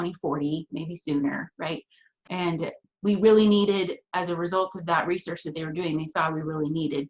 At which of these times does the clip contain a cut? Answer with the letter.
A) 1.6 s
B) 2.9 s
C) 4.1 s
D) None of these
B